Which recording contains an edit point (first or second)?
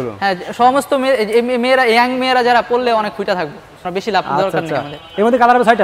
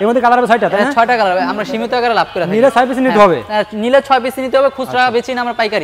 first